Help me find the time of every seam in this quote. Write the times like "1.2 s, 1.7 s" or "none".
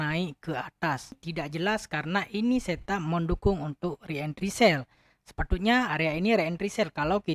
1.3 s